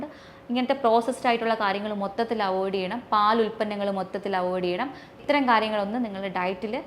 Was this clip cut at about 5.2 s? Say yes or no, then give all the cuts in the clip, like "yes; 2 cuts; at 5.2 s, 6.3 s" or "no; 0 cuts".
yes; 1 cut; at 5.2 s